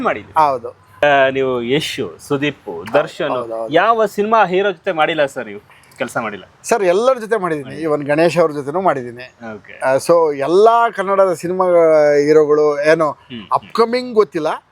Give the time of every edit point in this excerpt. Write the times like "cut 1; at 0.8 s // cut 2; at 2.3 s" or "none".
cut 1; at 1.0 s